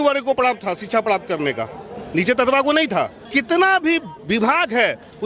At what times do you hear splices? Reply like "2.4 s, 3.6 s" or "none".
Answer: 3.2 s